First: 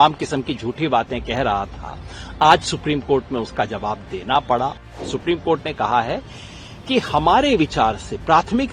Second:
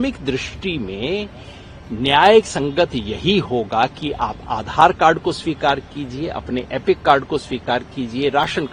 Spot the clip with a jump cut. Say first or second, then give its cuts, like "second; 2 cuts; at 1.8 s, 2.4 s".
first; 1 cut; at 5.0 s